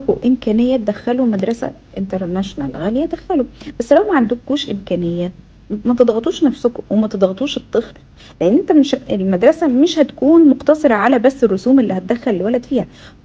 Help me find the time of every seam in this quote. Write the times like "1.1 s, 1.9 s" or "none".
none